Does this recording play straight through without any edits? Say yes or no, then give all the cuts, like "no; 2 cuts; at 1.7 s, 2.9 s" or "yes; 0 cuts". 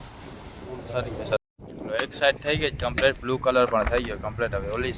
no; 1 cut; at 1.4 s